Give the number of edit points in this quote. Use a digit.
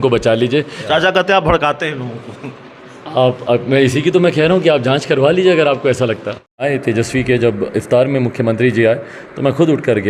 2